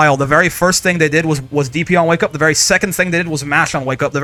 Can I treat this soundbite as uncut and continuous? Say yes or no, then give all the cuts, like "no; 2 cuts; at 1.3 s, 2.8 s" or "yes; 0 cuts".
yes; 0 cuts